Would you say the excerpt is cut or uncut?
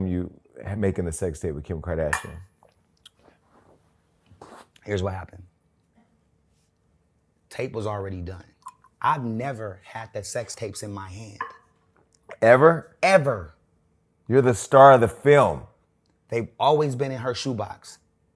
uncut